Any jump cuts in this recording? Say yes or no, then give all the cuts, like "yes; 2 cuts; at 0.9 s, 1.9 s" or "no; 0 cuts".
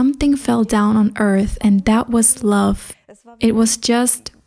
no; 0 cuts